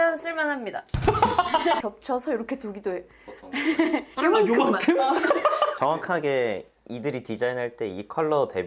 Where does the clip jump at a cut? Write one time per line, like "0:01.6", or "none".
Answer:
0:01.8